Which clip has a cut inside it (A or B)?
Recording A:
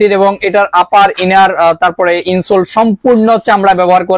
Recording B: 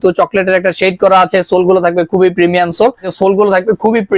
B